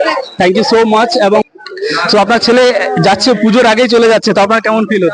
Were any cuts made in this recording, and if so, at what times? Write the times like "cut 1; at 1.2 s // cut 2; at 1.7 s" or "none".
cut 1; at 1.4 s